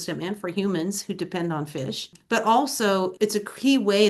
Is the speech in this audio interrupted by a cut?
yes; 2 cuts; at 2.1 s, 3.1 s

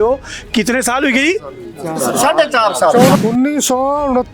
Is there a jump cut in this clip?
yes; 1 cut; at 3.2 s

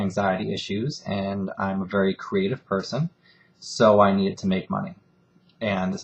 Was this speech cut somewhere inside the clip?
no; 0 cuts

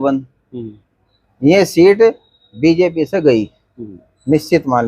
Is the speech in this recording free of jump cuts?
yes; 0 cuts

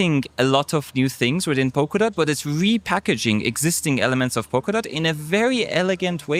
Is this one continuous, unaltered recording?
yes; 0 cuts

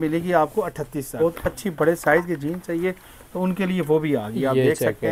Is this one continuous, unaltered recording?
no; 1 cut; at 1.1 s

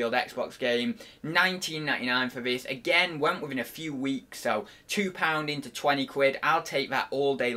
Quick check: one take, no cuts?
yes; 0 cuts

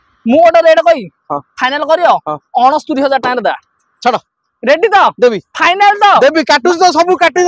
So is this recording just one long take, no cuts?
yes; 0 cuts

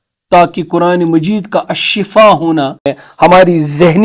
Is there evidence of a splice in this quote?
yes; 1 cut; at 3.0 s

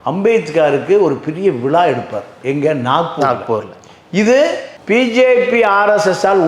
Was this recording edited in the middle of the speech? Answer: no; 0 cuts

